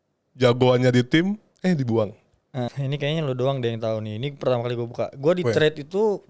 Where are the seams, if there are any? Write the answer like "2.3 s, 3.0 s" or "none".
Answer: 2.7 s